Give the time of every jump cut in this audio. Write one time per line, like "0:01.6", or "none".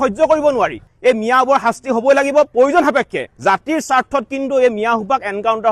0:00.9